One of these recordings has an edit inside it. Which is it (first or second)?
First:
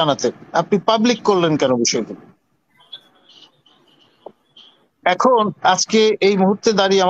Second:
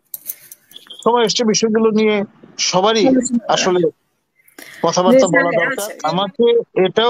second